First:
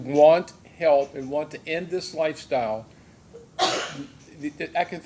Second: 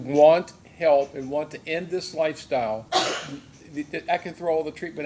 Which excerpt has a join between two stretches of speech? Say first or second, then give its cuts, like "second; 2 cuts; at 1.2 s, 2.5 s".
second; 1 cut; at 2.8 s